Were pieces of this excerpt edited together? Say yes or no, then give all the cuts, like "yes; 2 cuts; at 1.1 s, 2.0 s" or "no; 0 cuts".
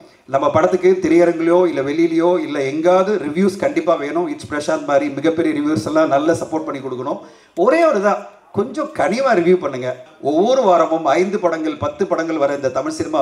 yes; 1 cut; at 10.1 s